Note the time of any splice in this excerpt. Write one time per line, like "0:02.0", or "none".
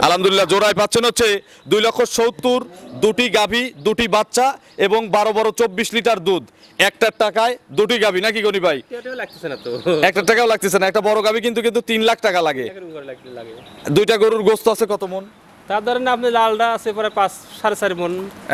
none